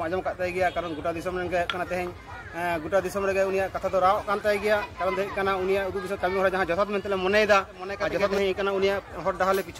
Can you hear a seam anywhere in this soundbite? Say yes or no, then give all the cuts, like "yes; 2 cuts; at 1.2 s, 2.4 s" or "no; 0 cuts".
yes; 1 cut; at 8.3 s